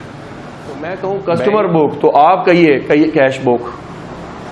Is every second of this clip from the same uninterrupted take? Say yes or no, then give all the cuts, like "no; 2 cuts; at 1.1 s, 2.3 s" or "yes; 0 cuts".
no; 1 cut; at 0.9 s